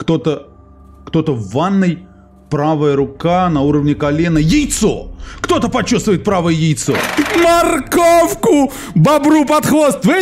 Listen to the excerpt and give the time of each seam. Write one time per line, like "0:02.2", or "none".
0:07.1

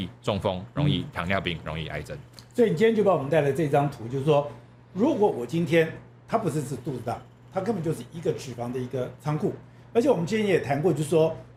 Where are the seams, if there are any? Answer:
none

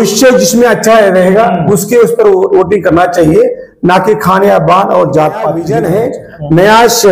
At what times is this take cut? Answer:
0:05.6

